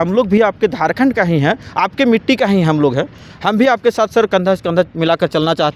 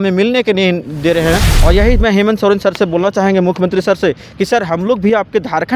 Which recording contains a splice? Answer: second; 1 cut; at 1.5 s

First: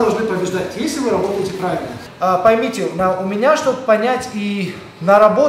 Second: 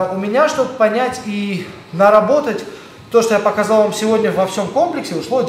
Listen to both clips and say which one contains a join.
first; 1 cut; at 2.0 s

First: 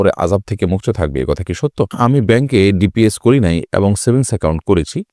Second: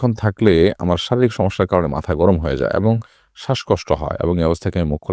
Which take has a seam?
first; 1 cut; at 1.9 s

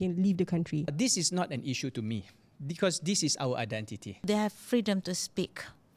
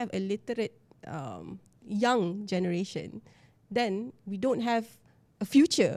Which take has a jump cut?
first; 2 cuts; at 0.9 s, 4.3 s

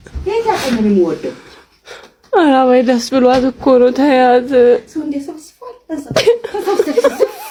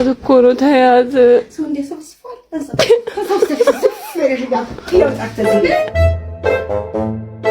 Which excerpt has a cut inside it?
second; 1 cut; at 5.8 s

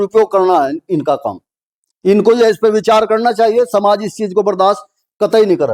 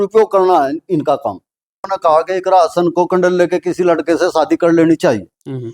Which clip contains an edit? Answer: second; 1 cut; at 1.9 s

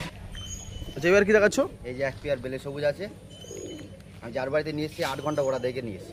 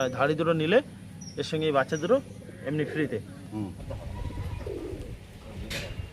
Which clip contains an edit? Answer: second; 1 cut; at 3.9 s

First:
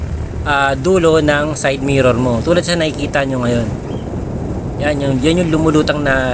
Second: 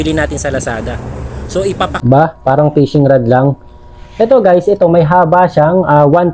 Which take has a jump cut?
second; 1 cut; at 1.9 s

